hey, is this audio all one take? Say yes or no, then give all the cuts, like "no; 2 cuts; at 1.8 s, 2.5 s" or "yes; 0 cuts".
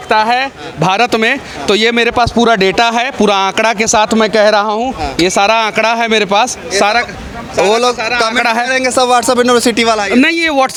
yes; 0 cuts